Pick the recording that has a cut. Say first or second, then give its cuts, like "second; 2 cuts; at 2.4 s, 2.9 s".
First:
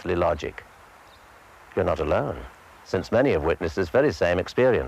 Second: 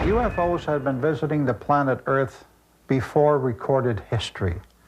second; 1 cut; at 2.7 s